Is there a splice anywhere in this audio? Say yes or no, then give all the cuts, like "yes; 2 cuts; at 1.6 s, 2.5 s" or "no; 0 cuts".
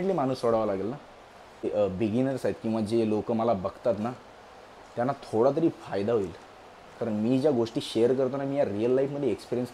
yes; 1 cut; at 1.7 s